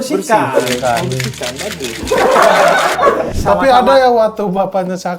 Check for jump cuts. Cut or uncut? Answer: cut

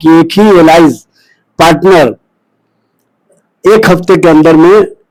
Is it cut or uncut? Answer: uncut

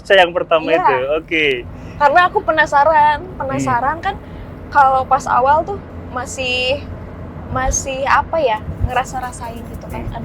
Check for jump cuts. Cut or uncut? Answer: uncut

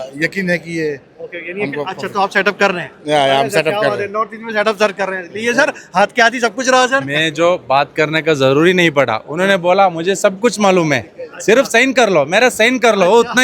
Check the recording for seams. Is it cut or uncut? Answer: uncut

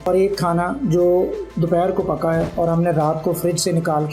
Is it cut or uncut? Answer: uncut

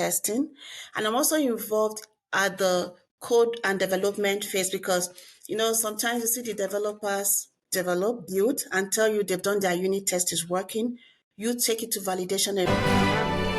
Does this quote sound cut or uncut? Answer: cut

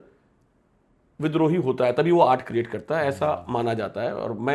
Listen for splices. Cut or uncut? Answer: uncut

